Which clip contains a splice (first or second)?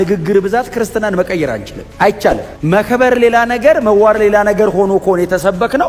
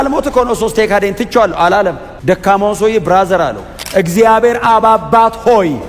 second